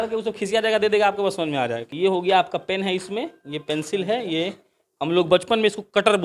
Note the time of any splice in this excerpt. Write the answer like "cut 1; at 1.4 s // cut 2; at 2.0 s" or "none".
cut 1; at 1.8 s